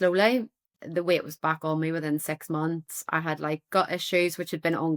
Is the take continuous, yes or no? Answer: yes